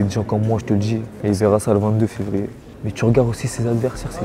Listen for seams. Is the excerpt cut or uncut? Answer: cut